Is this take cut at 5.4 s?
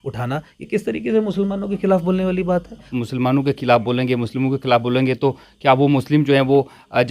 no; 1 cut; at 2.9 s

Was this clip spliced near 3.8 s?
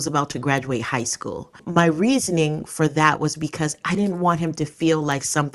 no; 1 cut; at 1.6 s

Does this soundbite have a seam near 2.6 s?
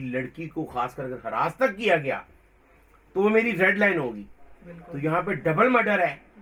no; 0 cuts

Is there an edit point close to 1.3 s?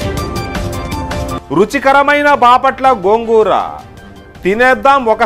yes; 1 cut; at 1.3 s

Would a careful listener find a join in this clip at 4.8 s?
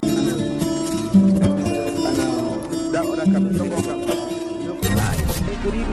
yes; 1 cut; at 4.8 s

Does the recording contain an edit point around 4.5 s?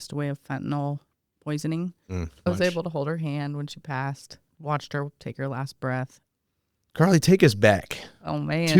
yes; 3 cuts; at 2.4 s, 4.5 s, 6.2 s

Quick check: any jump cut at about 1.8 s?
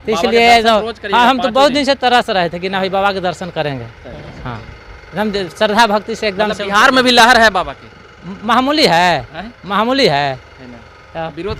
no; 0 cuts

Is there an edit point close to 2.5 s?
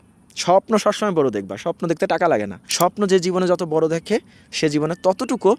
no; 0 cuts

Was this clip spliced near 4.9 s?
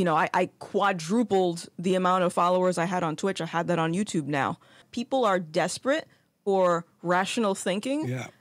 yes; 1 cut; at 4.9 s

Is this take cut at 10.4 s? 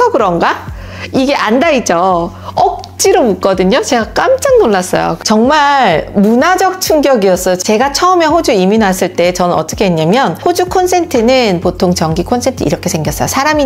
yes; 3 cuts; at 5.2 s, 7.6 s, 10.4 s

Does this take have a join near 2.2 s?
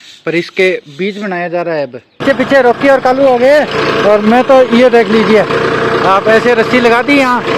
yes; 1 cut; at 2.2 s

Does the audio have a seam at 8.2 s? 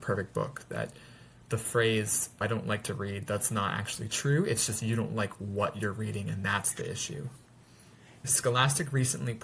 yes; 2 cuts; at 2.4 s, 8.2 s

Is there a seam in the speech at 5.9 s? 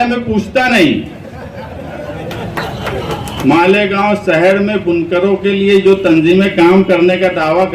no; 1 cut; at 3.4 s

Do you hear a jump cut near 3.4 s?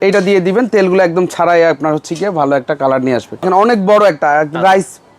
yes; 1 cut; at 3.4 s

